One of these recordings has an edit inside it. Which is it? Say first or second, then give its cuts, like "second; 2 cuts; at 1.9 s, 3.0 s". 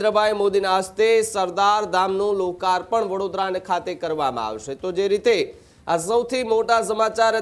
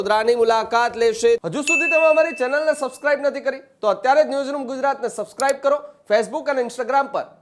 second; 1 cut; at 1.4 s